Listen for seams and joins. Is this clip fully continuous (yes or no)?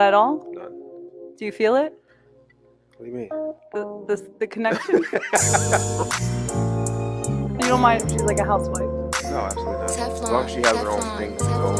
yes